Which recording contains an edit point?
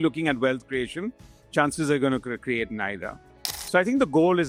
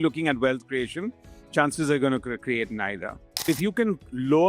second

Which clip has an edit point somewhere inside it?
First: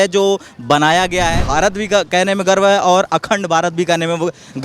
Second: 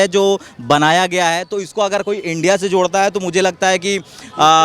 first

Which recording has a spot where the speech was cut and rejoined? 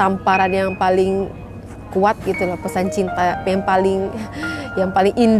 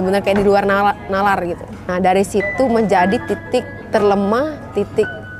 second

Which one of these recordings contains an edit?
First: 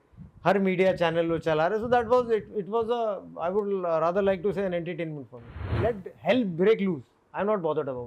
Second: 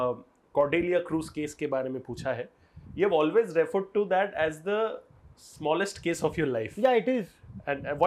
first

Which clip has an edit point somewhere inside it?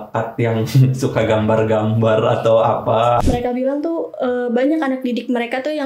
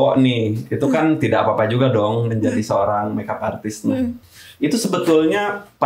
first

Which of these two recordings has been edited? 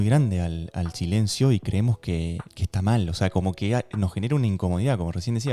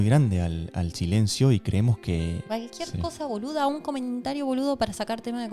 second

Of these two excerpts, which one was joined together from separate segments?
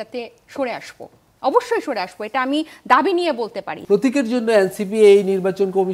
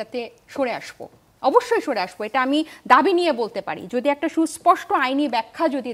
first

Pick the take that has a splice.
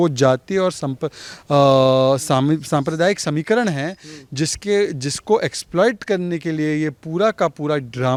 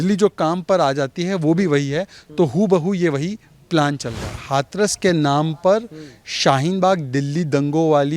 second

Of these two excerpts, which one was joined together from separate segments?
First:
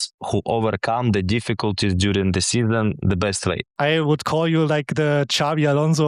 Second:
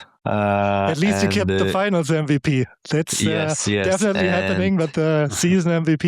first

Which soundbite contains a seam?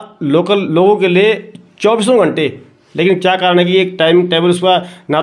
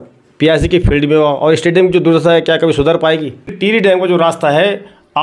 second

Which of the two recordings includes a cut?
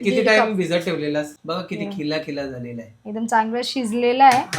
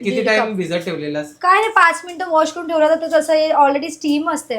first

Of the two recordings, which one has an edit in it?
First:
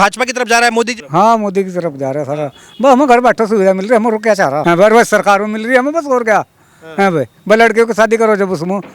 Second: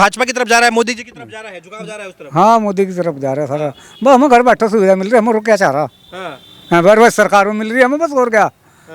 first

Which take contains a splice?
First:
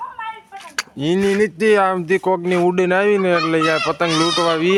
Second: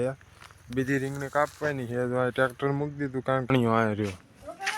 second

